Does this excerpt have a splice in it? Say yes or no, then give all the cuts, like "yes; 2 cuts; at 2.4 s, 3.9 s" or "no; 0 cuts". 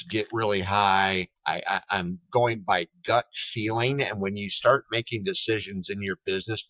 yes; 1 cut; at 1.3 s